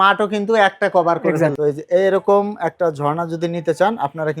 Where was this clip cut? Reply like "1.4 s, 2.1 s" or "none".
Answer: 1.6 s